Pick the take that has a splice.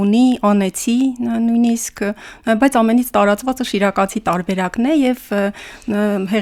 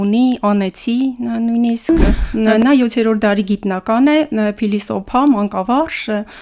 second; 1 cut; at 1.9 s

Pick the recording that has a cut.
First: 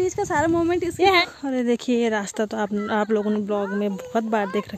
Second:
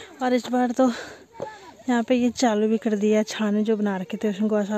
first; 1 cut; at 1.2 s

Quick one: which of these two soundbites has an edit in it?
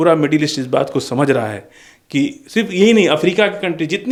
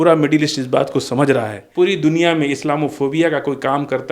second; 1 cut; at 1.6 s

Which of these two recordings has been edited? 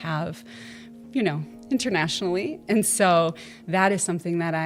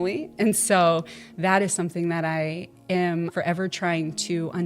second; 1 cut; at 3.3 s

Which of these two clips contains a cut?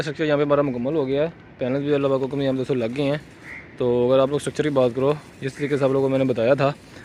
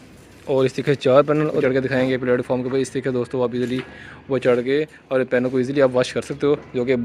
second; 1 cut; at 1.6 s

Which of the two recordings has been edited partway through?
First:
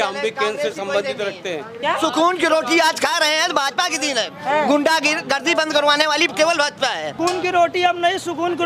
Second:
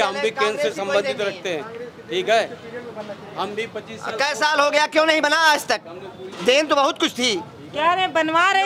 first; 2 cuts; at 1.7 s, 7.2 s

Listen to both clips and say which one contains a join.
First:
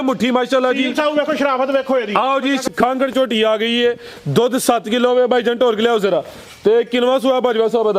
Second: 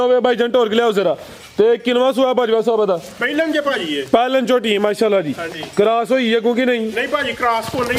first; 1 cut; at 2.7 s

